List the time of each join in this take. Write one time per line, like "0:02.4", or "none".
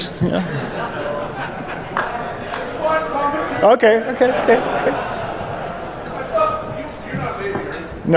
0:05.6